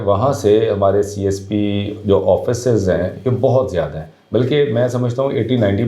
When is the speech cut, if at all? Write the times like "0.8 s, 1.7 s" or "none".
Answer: none